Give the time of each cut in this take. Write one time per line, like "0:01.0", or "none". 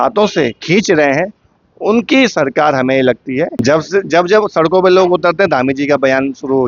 0:03.6